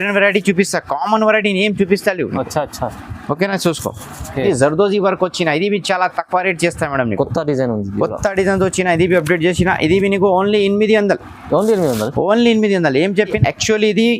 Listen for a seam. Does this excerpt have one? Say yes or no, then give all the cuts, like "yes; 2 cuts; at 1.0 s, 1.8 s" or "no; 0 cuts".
yes; 2 cuts; at 4.4 s, 13.4 s